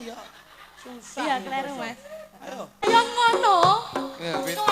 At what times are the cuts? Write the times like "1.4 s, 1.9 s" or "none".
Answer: 2.8 s